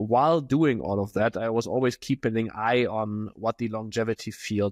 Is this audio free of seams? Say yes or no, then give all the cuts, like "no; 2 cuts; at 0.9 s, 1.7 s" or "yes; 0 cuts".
yes; 0 cuts